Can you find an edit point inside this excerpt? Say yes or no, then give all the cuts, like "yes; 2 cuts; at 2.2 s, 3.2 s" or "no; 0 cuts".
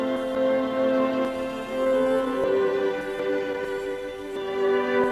yes; 1 cut; at 3.4 s